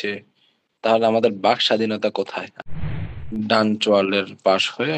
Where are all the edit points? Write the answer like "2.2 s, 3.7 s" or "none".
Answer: 2.7 s